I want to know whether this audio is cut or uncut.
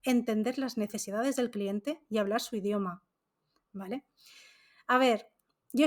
uncut